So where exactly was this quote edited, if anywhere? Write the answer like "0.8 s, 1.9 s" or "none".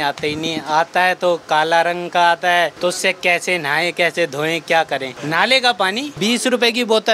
2.7 s, 5.1 s, 6.2 s